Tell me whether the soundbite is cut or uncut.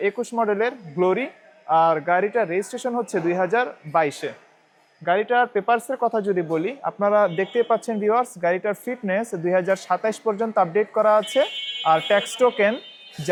uncut